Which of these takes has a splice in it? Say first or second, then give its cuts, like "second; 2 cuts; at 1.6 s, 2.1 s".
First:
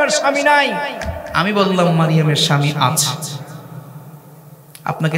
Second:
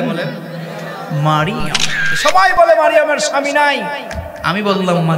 second; 1 cut; at 2.1 s